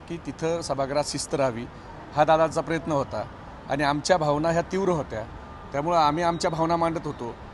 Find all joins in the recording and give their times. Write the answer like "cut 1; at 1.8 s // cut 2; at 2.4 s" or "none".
none